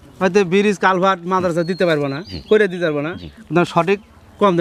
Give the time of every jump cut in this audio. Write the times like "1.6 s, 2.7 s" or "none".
none

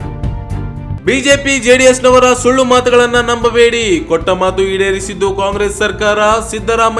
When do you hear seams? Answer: 0.9 s

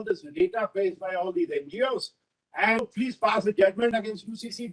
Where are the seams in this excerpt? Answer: 2.8 s

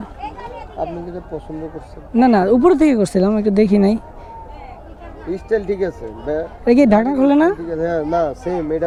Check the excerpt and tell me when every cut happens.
none

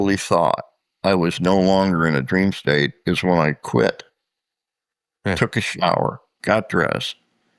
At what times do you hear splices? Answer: none

